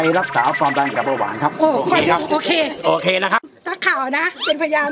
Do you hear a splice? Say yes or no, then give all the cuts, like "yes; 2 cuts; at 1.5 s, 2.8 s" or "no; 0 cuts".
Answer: yes; 1 cut; at 3.5 s